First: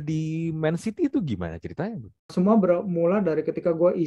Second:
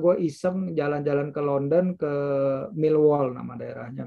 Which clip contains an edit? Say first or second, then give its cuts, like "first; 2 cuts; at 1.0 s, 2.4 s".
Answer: first; 1 cut; at 2.3 s